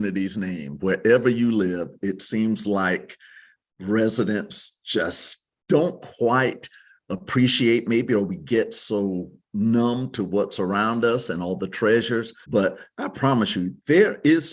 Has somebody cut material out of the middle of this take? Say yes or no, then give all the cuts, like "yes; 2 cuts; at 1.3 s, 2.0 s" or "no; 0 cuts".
yes; 1 cut; at 12.4 s